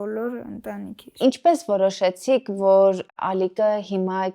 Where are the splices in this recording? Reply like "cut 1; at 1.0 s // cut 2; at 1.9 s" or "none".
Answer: cut 1; at 1.0 s